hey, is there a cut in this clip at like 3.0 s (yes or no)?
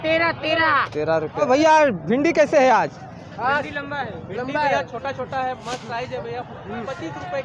no